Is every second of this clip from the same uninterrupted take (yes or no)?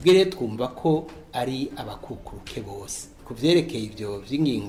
yes